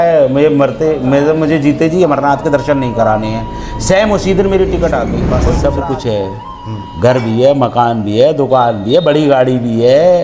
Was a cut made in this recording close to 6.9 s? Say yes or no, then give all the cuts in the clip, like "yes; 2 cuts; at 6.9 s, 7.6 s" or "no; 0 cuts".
no; 1 cut; at 5.4 s